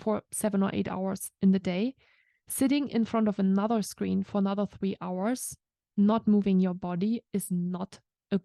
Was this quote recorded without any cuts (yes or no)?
yes